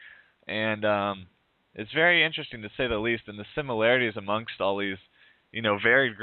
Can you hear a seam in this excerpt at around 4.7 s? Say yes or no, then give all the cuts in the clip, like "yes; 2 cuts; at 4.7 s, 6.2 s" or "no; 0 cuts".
yes; 1 cut; at 4.7 s